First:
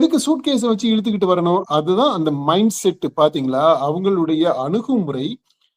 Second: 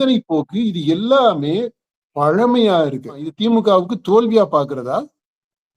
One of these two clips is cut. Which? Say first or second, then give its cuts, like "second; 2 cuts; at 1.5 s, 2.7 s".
second; 1 cut; at 3.3 s